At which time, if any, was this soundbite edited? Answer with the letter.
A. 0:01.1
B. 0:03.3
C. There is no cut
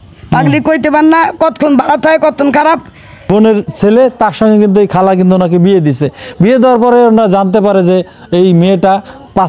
B